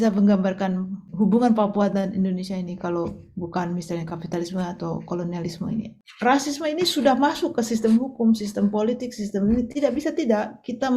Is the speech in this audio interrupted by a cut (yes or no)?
yes